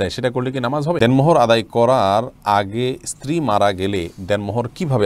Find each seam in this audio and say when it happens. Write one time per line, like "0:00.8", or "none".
0:01.0

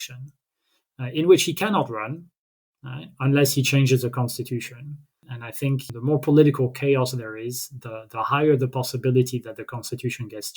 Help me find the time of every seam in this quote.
0:05.4

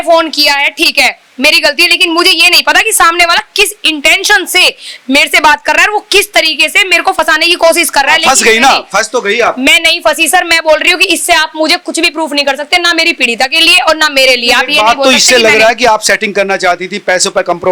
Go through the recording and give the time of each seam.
none

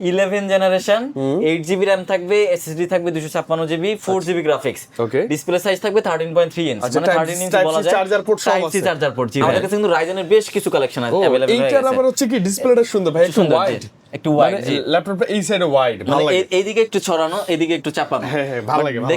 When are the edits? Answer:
0:09.4

